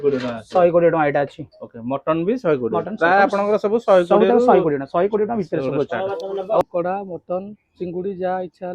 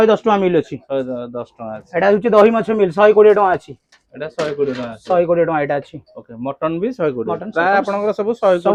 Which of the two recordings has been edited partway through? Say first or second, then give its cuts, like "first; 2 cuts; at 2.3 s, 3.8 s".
first; 1 cut; at 6.6 s